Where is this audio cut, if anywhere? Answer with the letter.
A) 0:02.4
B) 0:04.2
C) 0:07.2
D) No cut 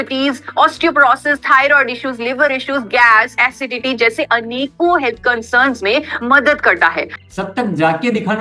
C